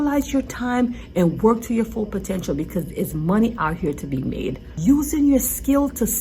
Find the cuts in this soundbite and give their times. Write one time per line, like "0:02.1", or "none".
0:04.7